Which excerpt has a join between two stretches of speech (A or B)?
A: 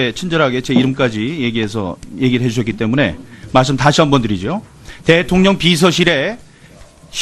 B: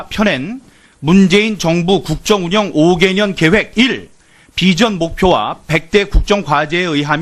A